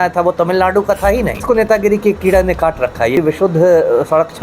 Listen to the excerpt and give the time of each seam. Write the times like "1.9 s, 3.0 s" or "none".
1.4 s, 3.2 s